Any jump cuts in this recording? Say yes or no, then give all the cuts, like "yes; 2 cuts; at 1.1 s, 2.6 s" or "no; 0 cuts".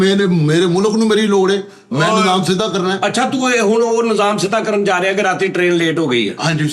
no; 0 cuts